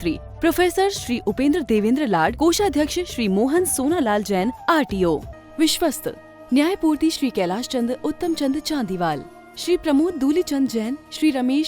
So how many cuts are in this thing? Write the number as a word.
one